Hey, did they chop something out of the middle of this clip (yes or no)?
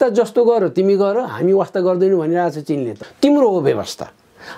yes